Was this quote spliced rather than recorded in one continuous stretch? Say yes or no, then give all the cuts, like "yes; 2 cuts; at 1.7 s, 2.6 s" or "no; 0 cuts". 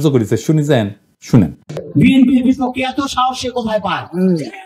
yes; 1 cut; at 1.8 s